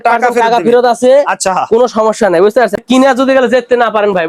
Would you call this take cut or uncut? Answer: cut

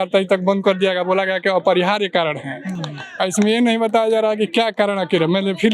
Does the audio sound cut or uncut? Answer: uncut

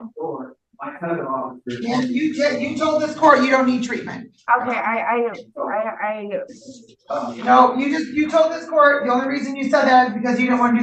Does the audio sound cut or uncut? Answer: uncut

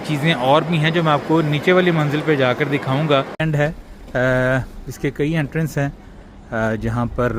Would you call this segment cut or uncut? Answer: cut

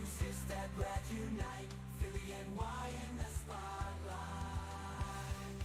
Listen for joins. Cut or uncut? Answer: uncut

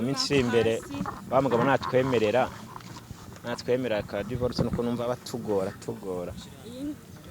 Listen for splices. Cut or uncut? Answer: uncut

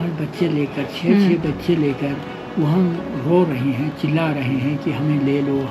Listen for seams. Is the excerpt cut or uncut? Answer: uncut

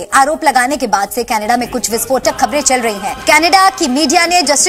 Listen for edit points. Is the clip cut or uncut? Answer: uncut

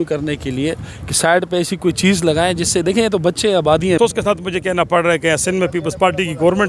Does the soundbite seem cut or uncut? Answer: cut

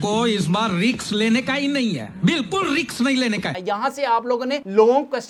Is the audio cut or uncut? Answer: uncut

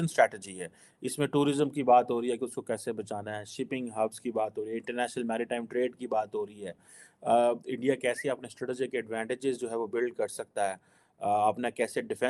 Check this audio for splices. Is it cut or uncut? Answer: uncut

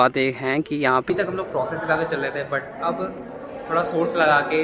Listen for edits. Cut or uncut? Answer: cut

